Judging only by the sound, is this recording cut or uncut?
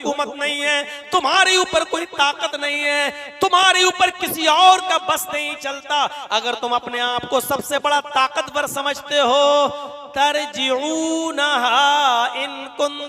uncut